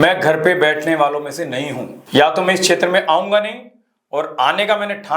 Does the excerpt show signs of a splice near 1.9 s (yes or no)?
yes